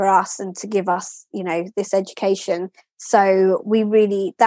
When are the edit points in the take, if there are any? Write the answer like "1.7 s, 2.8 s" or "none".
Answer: none